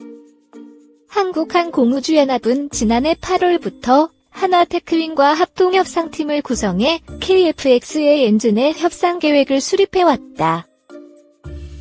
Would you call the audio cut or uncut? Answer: cut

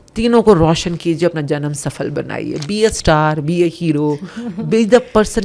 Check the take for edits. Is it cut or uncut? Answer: uncut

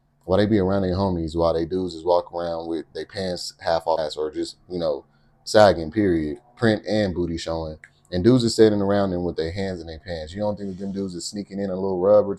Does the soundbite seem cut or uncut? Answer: cut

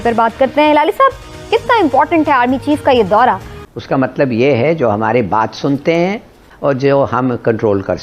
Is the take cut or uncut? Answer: cut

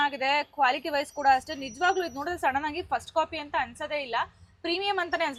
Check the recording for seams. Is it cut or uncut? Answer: uncut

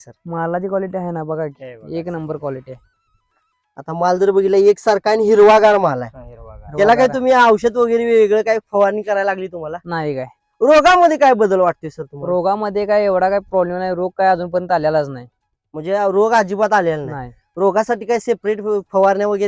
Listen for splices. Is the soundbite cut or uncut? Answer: uncut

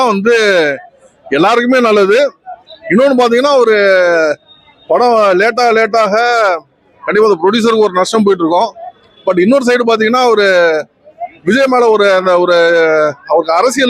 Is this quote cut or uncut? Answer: uncut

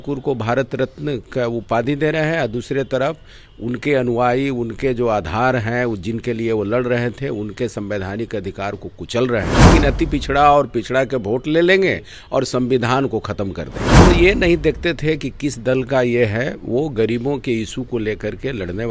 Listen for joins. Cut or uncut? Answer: cut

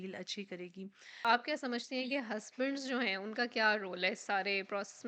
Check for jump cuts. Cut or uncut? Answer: cut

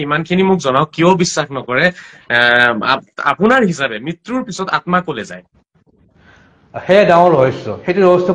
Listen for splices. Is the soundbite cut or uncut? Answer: uncut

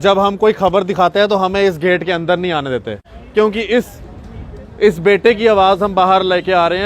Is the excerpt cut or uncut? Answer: cut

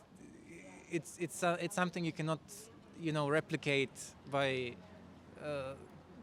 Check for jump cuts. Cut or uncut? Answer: uncut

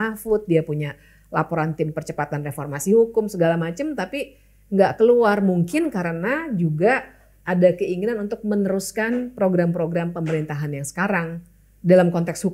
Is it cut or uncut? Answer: uncut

